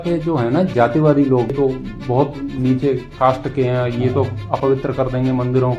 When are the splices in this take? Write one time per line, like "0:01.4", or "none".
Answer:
0:01.5